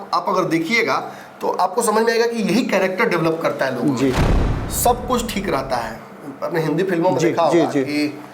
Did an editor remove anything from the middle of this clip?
yes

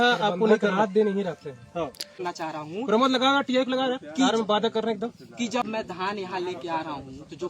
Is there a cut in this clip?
yes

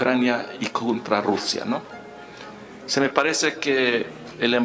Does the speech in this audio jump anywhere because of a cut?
no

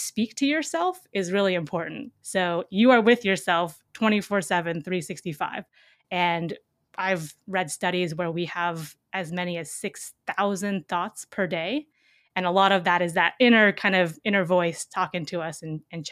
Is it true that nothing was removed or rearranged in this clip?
yes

